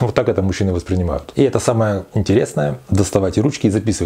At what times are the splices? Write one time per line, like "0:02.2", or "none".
0:01.2